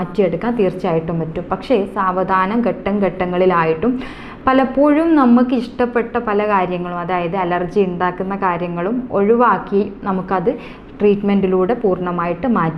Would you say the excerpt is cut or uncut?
uncut